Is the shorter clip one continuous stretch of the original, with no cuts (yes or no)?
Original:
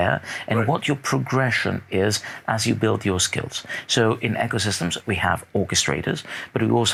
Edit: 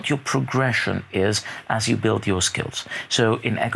yes